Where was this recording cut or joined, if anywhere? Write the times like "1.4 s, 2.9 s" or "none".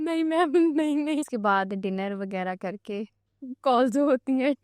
1.3 s